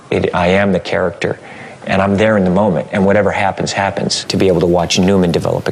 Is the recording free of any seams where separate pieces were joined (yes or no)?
no